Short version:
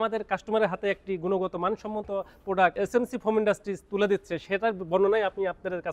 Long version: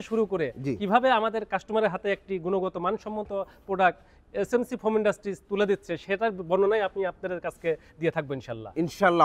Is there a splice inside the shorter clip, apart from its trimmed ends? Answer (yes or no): yes